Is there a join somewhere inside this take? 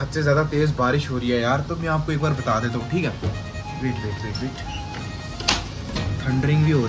no; 0 cuts

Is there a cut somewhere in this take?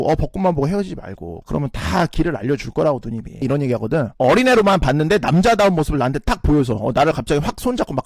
yes; 2 cuts; at 1.3 s, 3.4 s

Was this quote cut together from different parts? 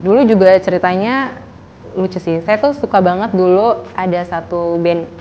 no; 0 cuts

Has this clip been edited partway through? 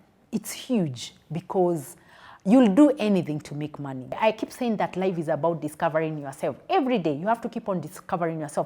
yes; 1 cut; at 4.2 s

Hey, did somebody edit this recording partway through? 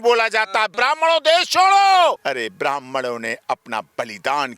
yes; 2 cuts; at 0.7 s, 2.2 s

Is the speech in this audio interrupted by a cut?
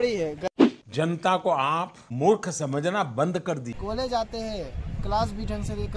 yes; 1 cut; at 3.7 s

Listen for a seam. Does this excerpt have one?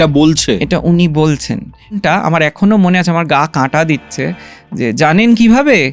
yes; 1 cut; at 2.0 s

